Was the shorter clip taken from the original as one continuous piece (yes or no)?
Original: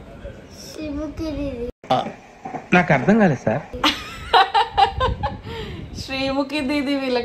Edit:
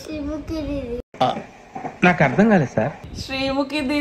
no